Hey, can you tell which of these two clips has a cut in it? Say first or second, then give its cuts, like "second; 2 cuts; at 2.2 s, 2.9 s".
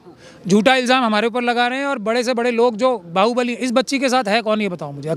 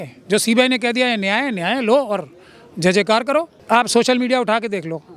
second; 1 cut; at 3.6 s